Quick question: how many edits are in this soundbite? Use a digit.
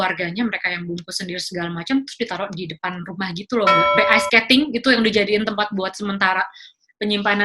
1